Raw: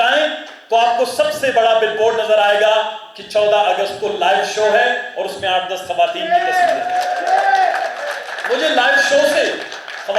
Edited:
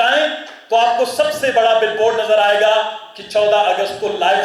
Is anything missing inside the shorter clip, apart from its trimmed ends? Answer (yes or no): no